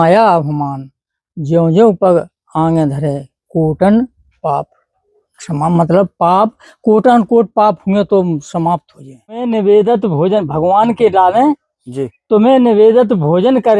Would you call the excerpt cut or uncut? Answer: cut